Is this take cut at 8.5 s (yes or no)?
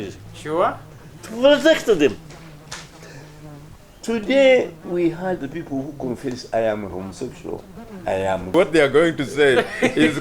yes